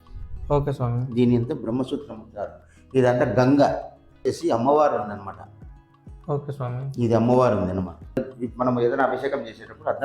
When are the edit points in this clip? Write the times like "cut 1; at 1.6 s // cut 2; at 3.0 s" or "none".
cut 1; at 4.2 s // cut 2; at 8.3 s

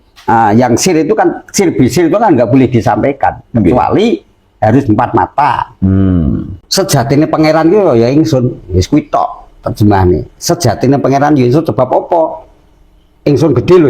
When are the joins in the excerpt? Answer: cut 1; at 6.6 s

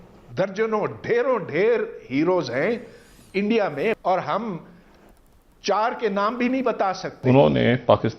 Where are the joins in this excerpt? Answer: cut 1; at 4.0 s // cut 2; at 7.1 s

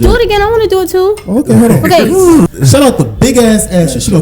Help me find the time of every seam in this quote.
cut 1; at 2.5 s

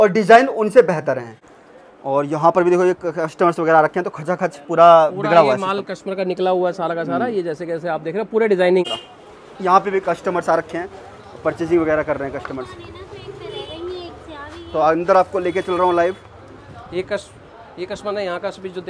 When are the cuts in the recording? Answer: cut 1; at 1.3 s // cut 2; at 8.8 s

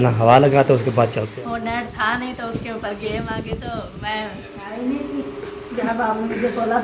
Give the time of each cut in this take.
cut 1; at 1.2 s // cut 2; at 4.7 s

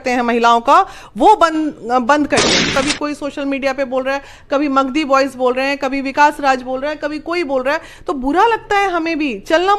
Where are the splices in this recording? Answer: cut 1; at 2.6 s

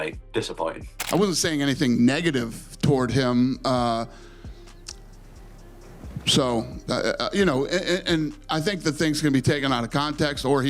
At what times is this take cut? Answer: cut 1; at 0.9 s

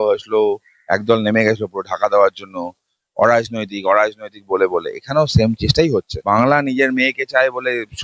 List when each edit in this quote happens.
cut 1; at 6.2 s

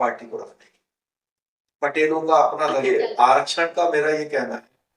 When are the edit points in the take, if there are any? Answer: cut 1; at 2.8 s

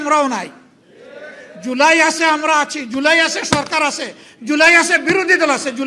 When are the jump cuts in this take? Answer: none

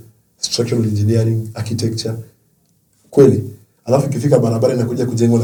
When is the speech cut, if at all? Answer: none

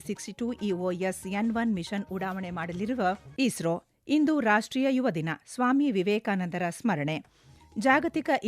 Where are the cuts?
cut 1; at 3.3 s

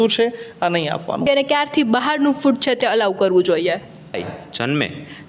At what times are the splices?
cut 1; at 1.2 s // cut 2; at 4.2 s

